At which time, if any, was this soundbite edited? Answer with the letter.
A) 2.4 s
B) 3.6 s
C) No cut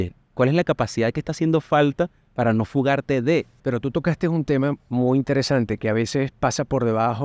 B